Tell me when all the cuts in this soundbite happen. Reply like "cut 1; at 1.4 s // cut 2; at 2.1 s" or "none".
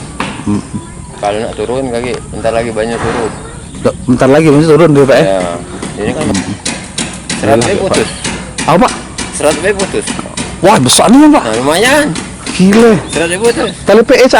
cut 1; at 6.3 s